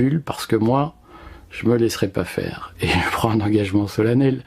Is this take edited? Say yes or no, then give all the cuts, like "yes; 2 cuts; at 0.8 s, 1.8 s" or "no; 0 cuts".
no; 0 cuts